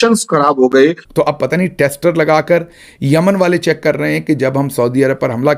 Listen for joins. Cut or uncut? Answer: cut